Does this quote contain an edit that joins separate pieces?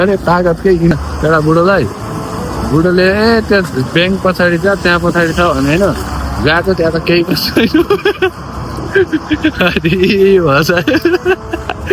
yes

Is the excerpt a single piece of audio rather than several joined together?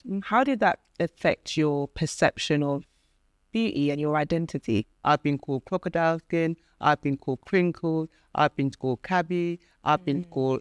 no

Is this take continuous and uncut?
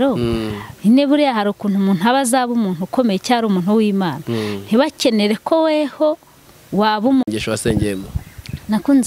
no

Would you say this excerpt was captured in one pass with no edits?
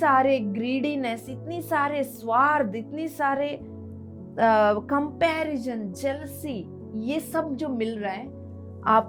yes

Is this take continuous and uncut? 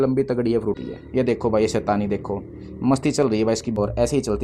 no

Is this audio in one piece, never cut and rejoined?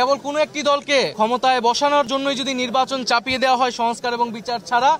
yes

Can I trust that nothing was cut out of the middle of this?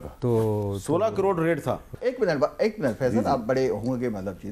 no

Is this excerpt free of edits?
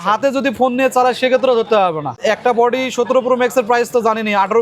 no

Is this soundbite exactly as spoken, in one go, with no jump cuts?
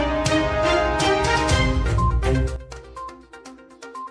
yes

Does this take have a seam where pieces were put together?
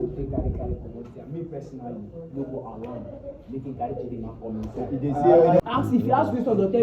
yes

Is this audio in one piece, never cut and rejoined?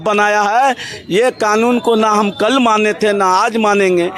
yes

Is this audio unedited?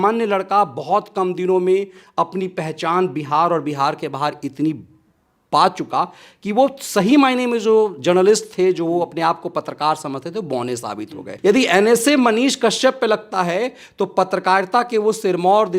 no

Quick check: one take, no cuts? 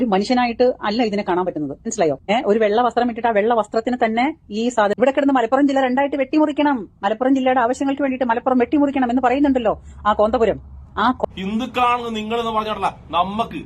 no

